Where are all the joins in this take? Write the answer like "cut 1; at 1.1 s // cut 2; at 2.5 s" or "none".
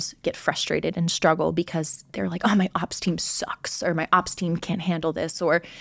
none

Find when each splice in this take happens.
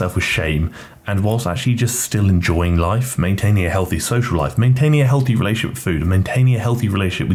none

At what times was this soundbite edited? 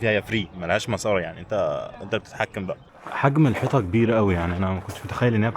cut 1; at 2.8 s

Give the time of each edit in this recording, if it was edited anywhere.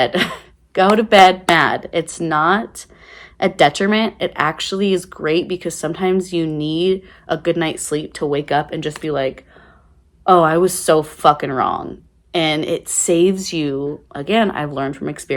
none

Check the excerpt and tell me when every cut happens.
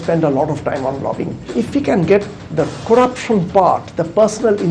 cut 1; at 1.4 s

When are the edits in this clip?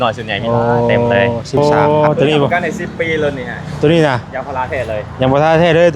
cut 1; at 1.6 s

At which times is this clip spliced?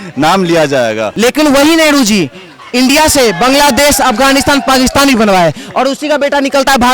cut 1; at 1.1 s

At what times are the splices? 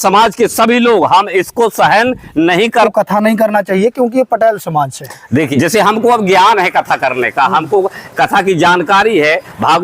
cut 1; at 2.9 s // cut 2; at 5.5 s

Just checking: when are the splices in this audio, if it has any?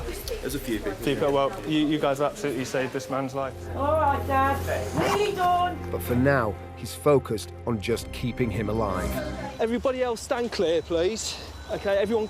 cut 1; at 3.6 s // cut 2; at 9.4 s

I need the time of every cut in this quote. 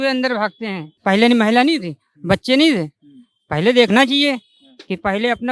cut 1; at 1.0 s

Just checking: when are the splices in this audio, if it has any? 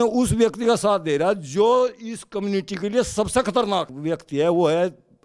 cut 1; at 3.9 s

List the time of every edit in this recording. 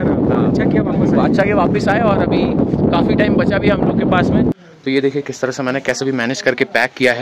cut 1; at 4.5 s

